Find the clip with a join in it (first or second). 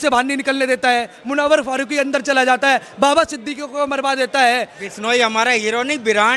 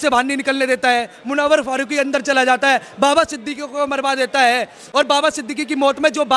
first